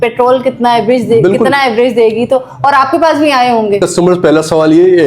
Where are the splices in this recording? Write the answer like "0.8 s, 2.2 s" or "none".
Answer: 3.9 s